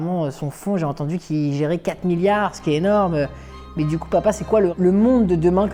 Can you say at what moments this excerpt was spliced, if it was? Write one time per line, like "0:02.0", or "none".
0:04.7